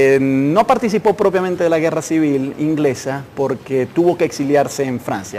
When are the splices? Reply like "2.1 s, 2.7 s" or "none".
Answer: none